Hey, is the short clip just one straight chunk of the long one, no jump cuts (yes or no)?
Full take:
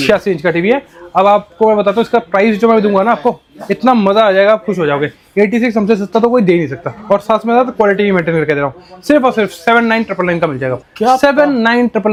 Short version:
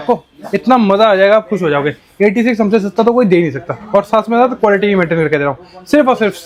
yes